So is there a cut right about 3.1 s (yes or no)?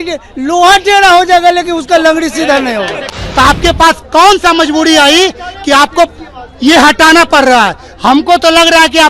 yes